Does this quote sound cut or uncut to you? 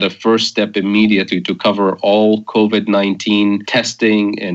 cut